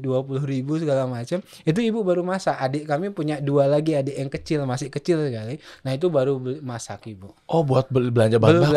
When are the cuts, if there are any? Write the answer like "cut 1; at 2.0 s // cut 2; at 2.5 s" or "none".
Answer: none